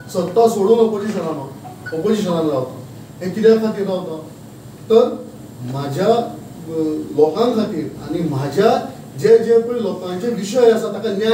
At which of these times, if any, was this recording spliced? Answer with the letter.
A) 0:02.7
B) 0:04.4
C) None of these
C